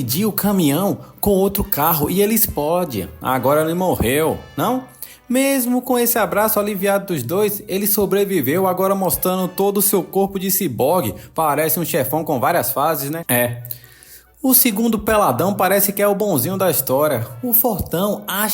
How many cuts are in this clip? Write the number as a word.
one